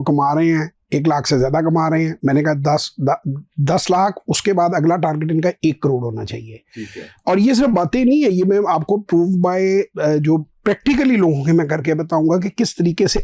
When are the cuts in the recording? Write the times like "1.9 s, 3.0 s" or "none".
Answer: none